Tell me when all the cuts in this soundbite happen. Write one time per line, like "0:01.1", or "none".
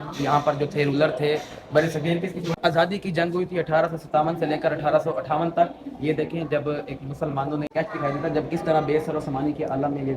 0:02.6
0:07.7